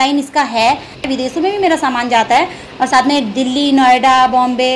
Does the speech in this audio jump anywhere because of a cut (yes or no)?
yes